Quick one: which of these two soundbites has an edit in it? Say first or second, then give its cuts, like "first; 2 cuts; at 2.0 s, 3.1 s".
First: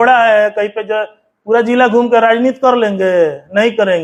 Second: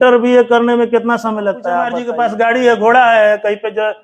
second; 1 cut; at 1.9 s